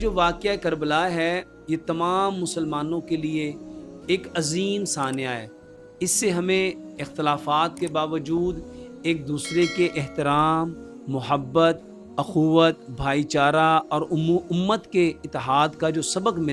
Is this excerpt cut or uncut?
uncut